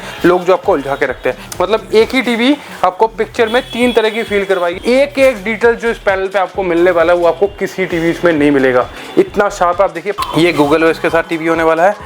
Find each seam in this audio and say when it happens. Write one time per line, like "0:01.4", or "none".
0:01.4
0:04.7
0:10.2